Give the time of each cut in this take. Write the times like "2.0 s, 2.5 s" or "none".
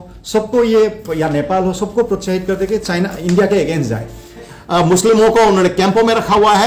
4.5 s